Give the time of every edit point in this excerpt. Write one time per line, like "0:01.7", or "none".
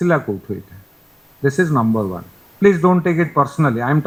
none